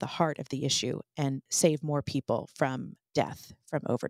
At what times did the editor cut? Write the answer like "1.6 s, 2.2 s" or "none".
1.5 s, 3.0 s